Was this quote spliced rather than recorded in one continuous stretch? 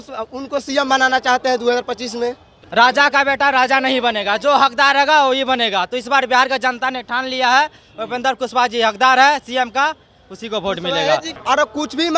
yes; 2 cuts; at 2.5 s, 11.3 s

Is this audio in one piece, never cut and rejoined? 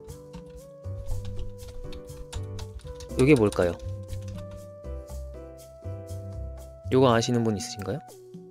yes; 0 cuts

